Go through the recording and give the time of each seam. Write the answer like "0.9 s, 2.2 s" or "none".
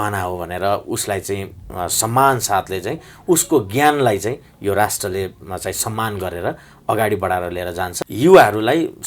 8.0 s